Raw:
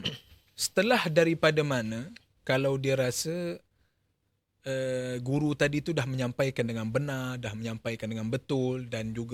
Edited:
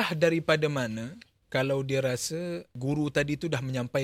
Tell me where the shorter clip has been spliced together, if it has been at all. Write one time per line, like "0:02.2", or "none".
0:02.8